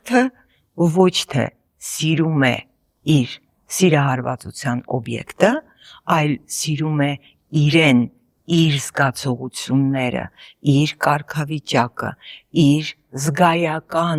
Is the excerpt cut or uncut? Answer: uncut